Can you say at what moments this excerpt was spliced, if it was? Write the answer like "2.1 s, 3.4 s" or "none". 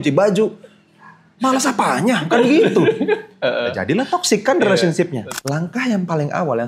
5.3 s